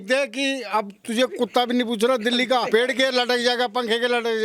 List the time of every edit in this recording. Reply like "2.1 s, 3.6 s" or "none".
2.7 s